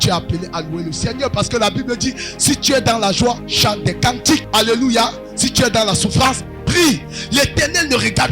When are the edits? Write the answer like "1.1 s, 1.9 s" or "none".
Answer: 3.5 s, 4.5 s, 7.1 s